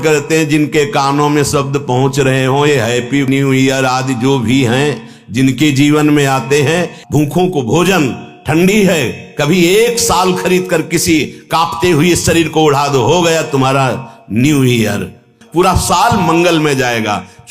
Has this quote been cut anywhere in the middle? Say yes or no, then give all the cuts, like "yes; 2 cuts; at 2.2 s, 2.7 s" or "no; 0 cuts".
yes; 2 cuts; at 6.9 s, 15.4 s